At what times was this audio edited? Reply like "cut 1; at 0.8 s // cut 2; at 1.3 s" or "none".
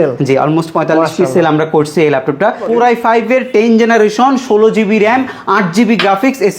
cut 1; at 2.6 s